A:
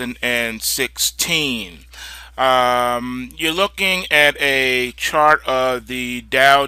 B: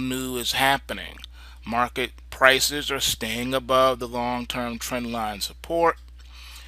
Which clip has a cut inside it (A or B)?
B